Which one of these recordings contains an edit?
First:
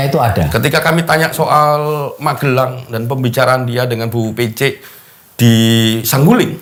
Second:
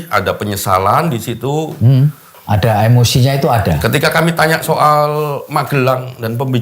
second; 1 cut; at 2.3 s

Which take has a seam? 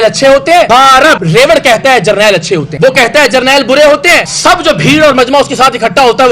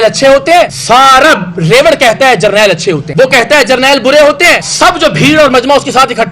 first; 1 cut; at 0.9 s

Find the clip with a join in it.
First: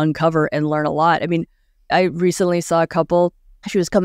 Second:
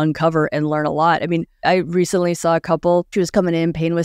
second; 2 cuts; at 1.5 s, 3.1 s

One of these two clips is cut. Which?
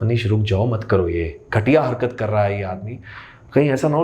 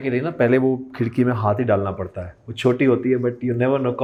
first; 1 cut; at 1.4 s

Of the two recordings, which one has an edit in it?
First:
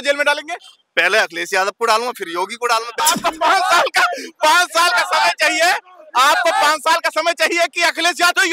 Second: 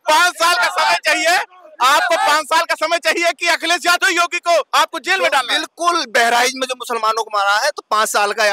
first; 1 cut; at 3.0 s

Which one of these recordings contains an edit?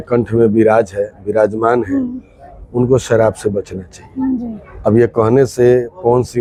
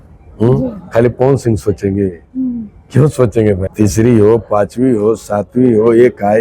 second; 1 cut; at 3.7 s

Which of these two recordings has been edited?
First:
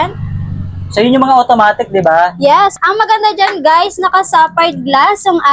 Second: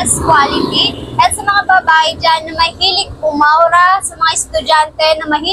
first; 1 cut; at 2.7 s

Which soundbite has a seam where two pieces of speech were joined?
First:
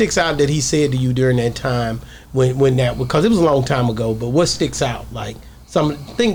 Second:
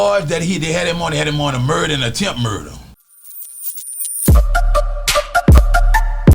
second; 1 cut; at 3.0 s

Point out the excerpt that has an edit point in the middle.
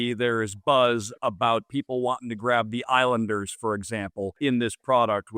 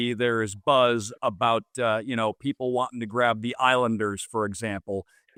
first; 2 cuts; at 1.7 s, 4.3 s

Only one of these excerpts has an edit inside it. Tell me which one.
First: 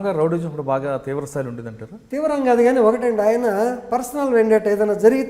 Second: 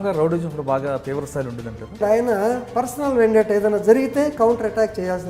second; 1 cut; at 2.0 s

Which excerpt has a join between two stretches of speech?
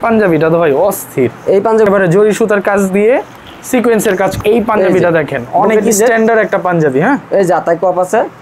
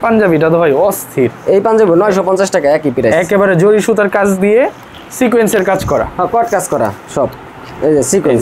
first; 2 cuts; at 1.9 s, 4.4 s

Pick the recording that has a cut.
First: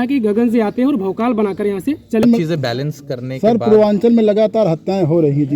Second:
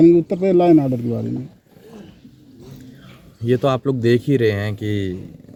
first; 1 cut; at 2.2 s

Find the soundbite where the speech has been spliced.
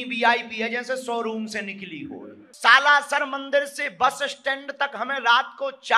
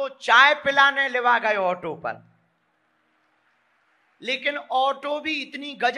first; 1 cut; at 2.4 s

